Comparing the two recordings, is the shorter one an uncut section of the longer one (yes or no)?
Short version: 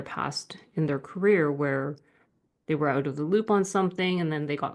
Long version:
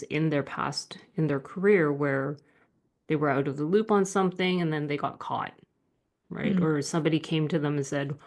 yes